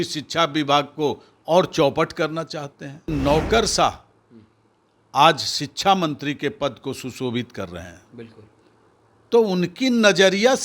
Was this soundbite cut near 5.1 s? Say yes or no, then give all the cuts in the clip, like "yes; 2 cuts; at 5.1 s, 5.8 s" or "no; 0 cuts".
no; 1 cut; at 3.1 s